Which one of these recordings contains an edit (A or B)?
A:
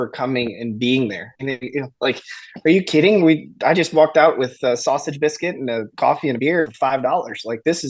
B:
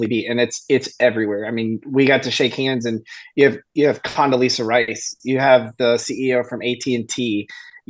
A